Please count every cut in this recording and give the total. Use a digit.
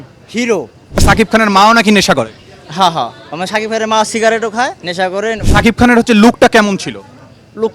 2